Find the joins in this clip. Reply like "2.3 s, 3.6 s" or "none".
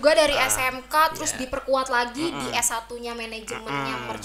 none